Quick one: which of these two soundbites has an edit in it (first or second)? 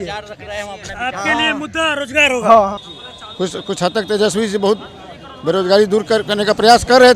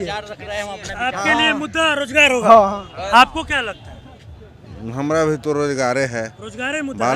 first